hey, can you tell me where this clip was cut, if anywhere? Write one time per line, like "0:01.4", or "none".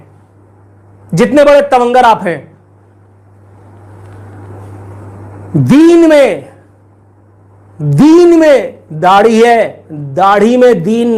none